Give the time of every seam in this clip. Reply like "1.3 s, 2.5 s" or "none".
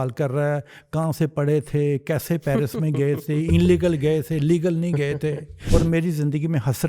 5.5 s